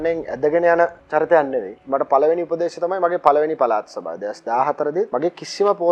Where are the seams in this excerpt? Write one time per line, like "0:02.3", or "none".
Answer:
0:01.0
0:01.8
0:05.1